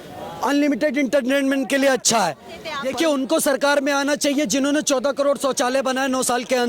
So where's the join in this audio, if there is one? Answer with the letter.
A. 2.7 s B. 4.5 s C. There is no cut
A